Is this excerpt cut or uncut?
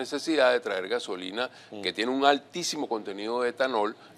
uncut